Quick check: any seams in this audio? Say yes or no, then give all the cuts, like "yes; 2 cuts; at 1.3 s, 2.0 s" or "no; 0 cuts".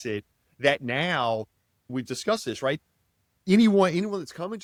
no; 0 cuts